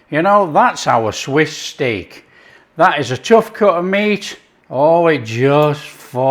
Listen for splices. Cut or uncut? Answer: cut